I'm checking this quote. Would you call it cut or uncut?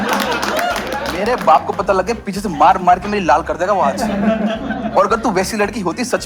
cut